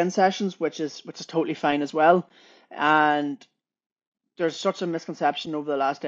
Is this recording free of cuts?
yes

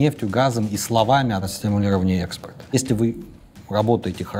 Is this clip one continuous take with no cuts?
no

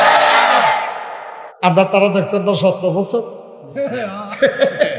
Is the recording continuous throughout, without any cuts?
no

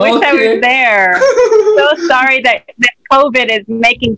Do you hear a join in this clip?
no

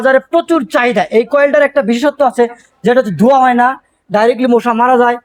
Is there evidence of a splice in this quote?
no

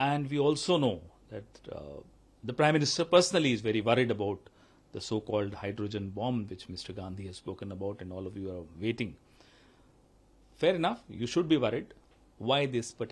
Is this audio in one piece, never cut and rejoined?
no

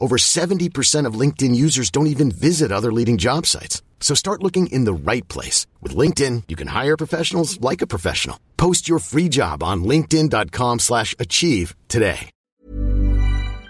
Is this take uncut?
no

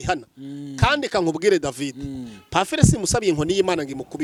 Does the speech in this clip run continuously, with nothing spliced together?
yes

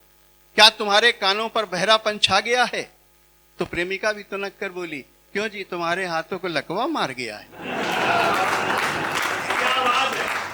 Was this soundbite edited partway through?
no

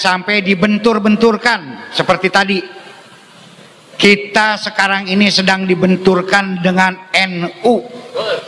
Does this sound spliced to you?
no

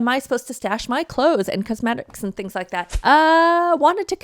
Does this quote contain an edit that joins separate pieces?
yes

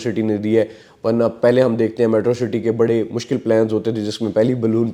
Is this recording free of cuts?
yes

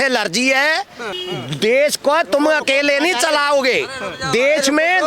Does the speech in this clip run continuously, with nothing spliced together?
no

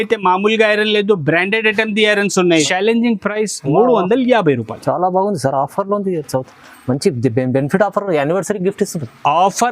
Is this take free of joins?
no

